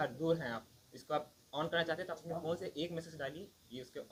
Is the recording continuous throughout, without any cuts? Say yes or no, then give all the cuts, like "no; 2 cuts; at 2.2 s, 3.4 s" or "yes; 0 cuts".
yes; 0 cuts